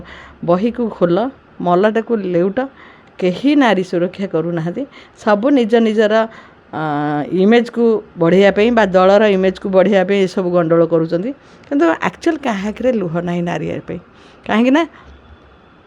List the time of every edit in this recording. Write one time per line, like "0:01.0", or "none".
none